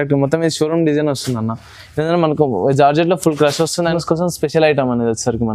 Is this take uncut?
no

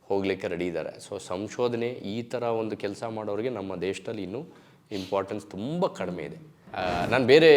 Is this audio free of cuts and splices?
no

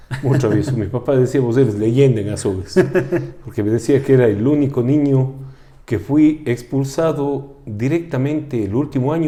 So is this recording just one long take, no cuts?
yes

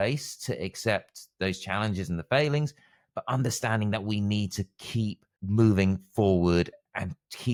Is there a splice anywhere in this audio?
no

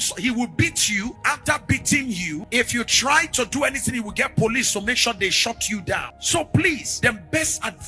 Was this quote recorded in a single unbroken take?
no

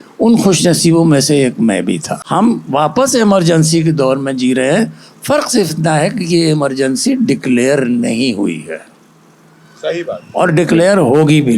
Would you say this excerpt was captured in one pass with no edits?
no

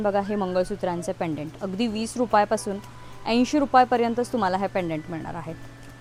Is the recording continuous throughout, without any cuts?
yes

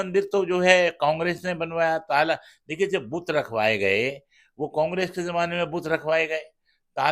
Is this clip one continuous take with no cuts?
yes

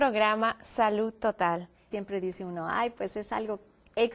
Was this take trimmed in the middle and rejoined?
no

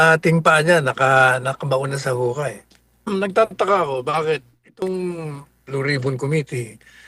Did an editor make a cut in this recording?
yes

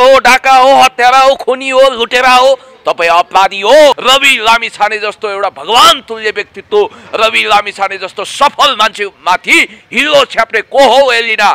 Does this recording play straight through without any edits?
no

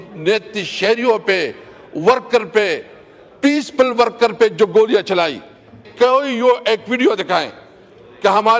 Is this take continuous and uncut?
no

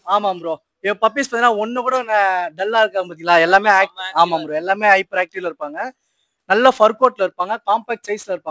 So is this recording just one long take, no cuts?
yes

